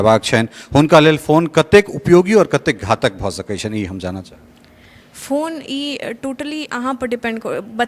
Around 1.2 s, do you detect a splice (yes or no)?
no